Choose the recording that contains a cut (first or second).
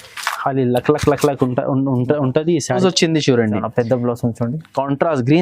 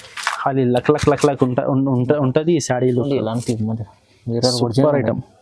first